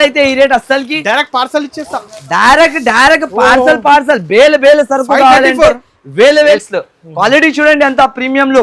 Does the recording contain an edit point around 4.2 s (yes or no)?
no